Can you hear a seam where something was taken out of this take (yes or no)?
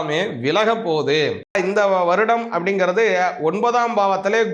yes